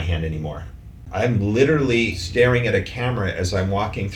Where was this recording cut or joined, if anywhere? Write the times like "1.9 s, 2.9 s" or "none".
1.0 s, 2.2 s